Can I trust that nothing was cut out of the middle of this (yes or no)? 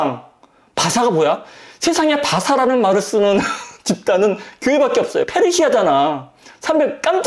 yes